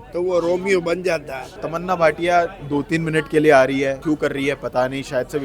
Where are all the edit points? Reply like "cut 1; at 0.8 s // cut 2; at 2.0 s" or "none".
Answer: cut 1; at 1.7 s // cut 2; at 4.0 s